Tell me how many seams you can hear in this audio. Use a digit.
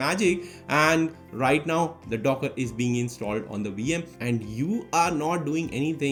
0